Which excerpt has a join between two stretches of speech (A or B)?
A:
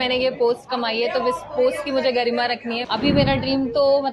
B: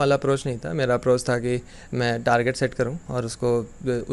A